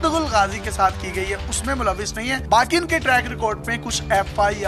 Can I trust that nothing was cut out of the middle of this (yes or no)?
yes